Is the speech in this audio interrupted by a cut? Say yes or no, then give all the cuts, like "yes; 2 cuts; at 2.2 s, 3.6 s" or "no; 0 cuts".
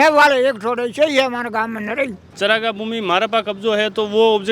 yes; 1 cut; at 2.2 s